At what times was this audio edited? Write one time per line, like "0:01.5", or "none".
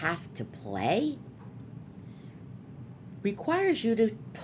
none